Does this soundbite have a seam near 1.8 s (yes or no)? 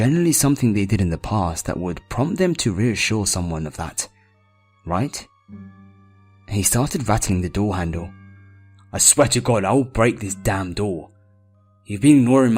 yes